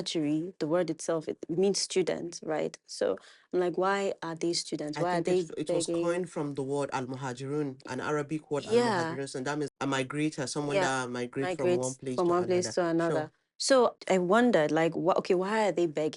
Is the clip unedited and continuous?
no; 1 cut; at 13.9 s

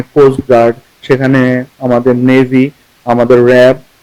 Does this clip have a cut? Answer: no; 0 cuts

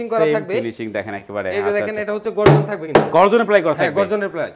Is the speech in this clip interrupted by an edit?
no; 0 cuts

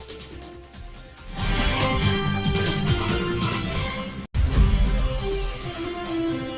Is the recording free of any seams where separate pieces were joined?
no; 2 cuts; at 4.2 s, 5.6 s

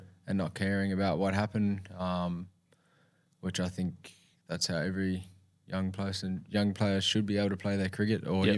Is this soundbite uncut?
yes; 0 cuts

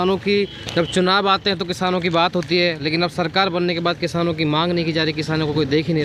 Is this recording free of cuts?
yes; 0 cuts

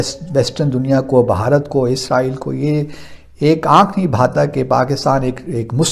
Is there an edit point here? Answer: no; 0 cuts

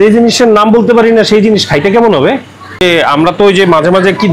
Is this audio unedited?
no; 1 cut; at 2.8 s

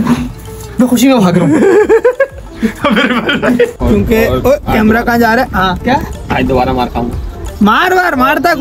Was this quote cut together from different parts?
yes; 1 cut; at 3.7 s

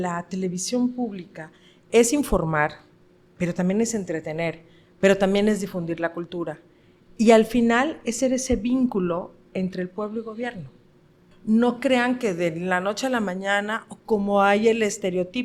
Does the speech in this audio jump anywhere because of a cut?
yes; 1 cut; at 11.3 s

